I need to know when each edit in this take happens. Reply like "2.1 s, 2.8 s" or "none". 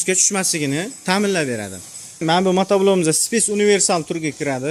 2.2 s